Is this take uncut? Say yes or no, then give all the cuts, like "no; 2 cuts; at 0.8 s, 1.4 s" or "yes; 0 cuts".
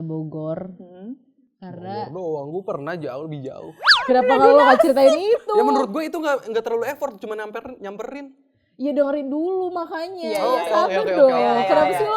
yes; 0 cuts